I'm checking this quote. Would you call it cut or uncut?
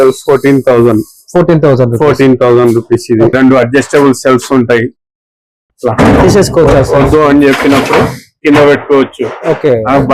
cut